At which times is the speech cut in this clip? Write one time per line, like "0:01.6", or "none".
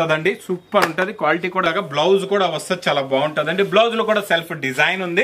0:01.6